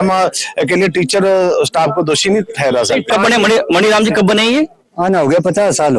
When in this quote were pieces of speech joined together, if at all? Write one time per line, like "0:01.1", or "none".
0:03.1